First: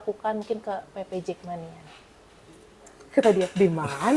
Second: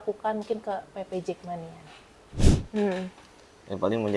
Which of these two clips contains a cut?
second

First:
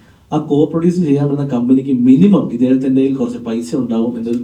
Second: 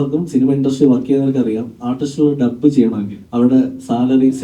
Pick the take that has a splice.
second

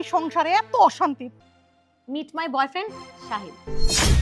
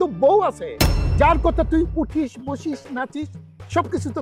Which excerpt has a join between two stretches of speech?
first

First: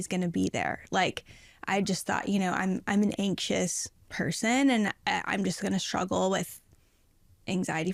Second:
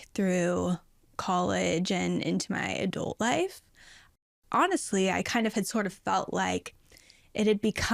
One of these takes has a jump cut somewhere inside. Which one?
second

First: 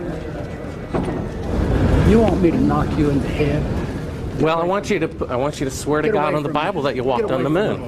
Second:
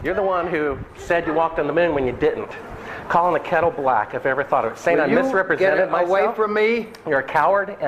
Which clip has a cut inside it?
first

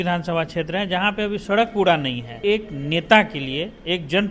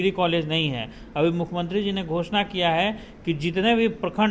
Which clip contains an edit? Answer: first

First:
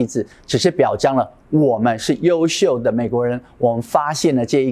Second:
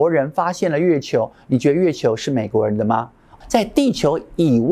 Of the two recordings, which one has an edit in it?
second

